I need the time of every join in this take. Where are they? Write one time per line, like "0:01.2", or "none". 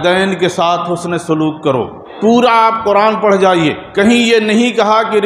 0:02.1
0:03.8